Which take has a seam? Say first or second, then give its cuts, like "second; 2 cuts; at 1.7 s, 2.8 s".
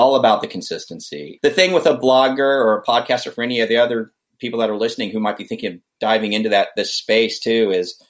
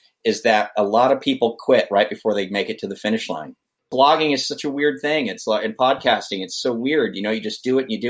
second; 1 cut; at 3.9 s